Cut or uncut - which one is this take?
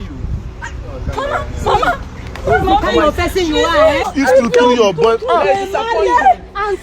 cut